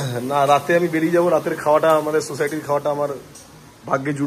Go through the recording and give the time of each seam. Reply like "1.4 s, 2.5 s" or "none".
none